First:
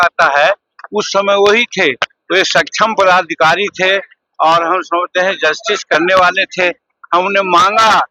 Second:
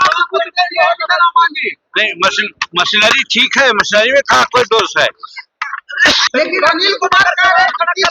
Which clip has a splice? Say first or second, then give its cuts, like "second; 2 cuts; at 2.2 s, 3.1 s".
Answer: second; 1 cut; at 6.2 s